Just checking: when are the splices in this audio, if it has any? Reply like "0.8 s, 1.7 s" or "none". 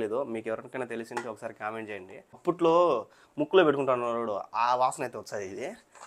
2.4 s